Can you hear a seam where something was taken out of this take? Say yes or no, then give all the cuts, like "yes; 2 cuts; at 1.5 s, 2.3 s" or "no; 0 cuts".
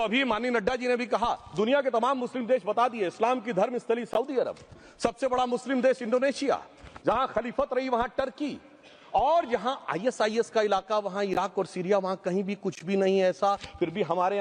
no; 0 cuts